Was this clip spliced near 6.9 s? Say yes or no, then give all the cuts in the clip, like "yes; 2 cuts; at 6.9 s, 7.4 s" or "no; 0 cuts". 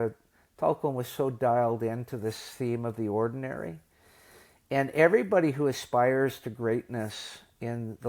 no; 0 cuts